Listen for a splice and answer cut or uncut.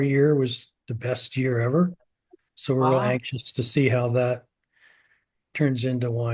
uncut